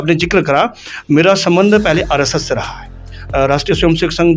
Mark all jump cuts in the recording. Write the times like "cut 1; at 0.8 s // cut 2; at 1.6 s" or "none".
none